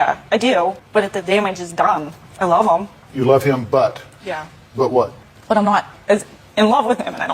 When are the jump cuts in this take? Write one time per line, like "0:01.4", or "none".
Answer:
0:00.8
0:02.2
0:03.0
0:05.3